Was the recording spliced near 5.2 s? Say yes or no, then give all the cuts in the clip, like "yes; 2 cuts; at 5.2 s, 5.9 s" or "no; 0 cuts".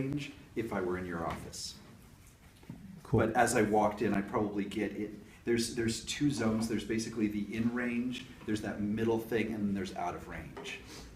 no; 1 cut; at 2.0 s